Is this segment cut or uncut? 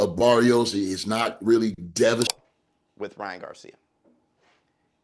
cut